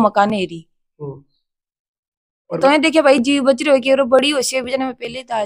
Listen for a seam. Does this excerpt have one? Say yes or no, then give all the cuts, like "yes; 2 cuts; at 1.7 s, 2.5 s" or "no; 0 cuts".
yes; 1 cut; at 2.6 s